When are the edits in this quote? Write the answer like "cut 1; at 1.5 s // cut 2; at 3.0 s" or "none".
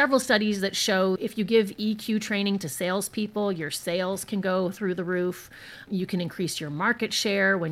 cut 1; at 1.2 s